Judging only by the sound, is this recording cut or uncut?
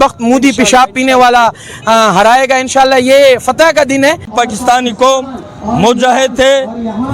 cut